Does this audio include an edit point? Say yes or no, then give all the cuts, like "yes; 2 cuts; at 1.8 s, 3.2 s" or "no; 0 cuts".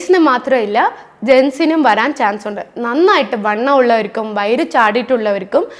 no; 0 cuts